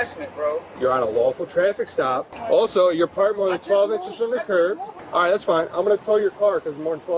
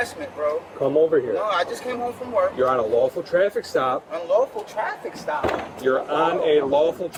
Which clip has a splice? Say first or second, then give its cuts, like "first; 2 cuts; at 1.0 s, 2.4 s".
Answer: first; 3 cuts; at 0.8 s, 2.3 s, 4.9 s